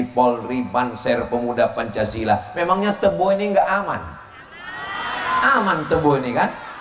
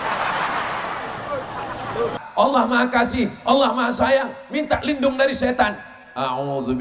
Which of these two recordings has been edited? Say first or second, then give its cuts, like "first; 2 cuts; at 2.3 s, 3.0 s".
second; 1 cut; at 2.2 s